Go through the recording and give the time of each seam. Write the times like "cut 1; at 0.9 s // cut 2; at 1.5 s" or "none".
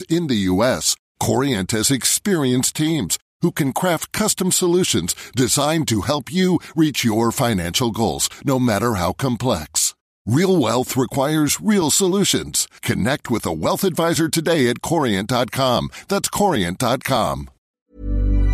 cut 1; at 17.5 s